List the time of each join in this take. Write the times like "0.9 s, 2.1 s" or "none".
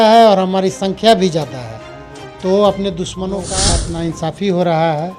3.5 s